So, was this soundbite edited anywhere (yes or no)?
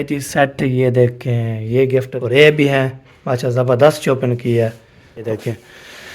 yes